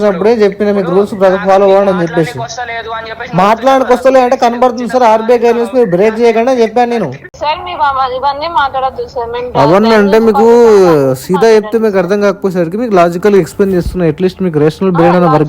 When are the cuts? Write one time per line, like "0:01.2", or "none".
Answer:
0:07.3